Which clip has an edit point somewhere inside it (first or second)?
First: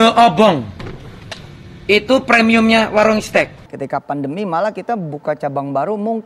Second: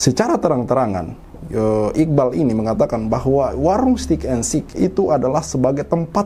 first